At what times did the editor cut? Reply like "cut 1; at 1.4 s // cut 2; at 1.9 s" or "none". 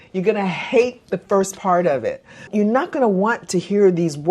cut 1; at 2.5 s